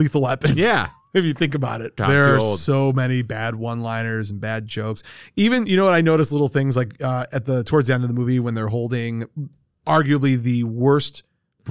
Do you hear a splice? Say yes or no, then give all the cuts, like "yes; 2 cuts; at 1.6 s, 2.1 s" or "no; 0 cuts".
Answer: yes; 1 cut; at 2.0 s